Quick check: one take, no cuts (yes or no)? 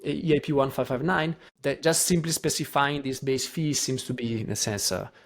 no